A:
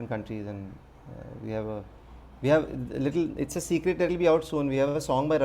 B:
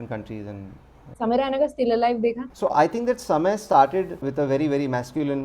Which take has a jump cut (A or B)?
B